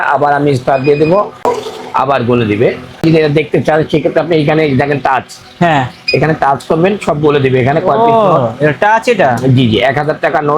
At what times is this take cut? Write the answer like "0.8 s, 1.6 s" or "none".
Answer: 1.5 s, 3.0 s